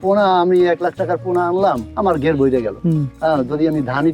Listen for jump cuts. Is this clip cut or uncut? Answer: cut